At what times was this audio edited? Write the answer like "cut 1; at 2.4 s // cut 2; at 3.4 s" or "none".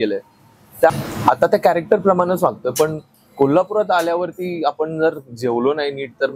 cut 1; at 0.9 s